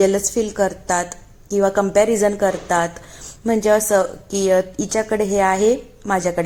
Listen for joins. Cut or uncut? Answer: uncut